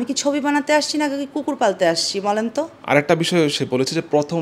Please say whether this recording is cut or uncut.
uncut